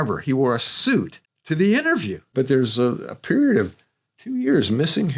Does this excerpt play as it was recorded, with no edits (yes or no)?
no